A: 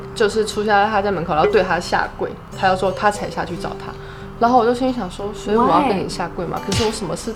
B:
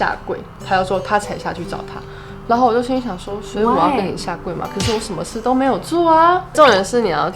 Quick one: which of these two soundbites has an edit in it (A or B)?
B